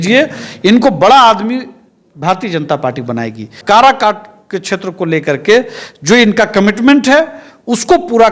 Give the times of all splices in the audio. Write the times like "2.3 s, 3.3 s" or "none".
3.5 s